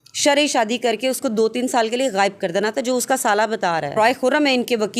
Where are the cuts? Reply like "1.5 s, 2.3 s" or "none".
3.9 s